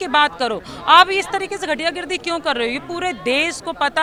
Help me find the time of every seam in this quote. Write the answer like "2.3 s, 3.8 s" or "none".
none